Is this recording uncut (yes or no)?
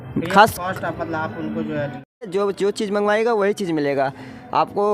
no